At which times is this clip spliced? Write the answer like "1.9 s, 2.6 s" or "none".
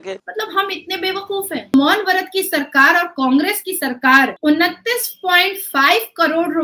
1.7 s